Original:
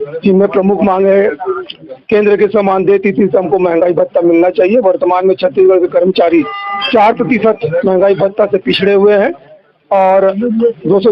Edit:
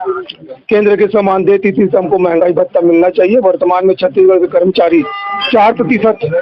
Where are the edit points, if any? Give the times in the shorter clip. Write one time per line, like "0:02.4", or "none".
none